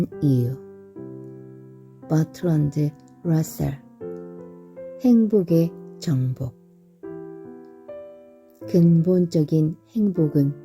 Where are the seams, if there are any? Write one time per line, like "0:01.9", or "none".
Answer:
0:06.5
0:08.7